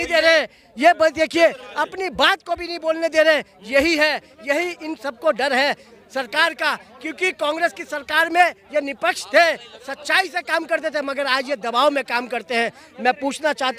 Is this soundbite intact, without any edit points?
yes; 0 cuts

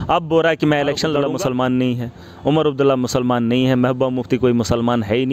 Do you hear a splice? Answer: yes; 1 cut; at 1.2 s

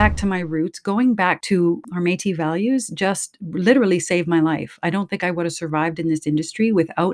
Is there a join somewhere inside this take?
yes; 1 cut; at 1.6 s

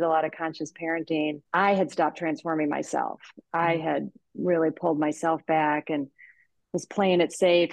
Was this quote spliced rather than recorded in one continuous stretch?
yes; 1 cut; at 1.4 s

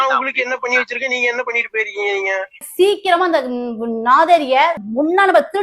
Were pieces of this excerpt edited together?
yes; 2 cuts; at 2.6 s, 4.8 s

